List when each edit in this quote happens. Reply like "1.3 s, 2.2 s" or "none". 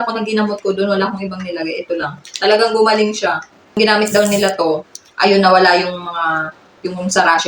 3.8 s